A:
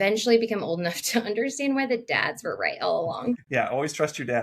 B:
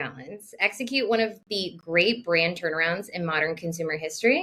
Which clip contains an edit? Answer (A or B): A